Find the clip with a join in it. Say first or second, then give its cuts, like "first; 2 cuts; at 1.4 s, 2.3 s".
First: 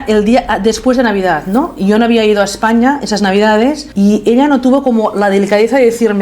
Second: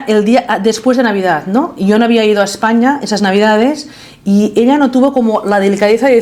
first; 1 cut; at 3.8 s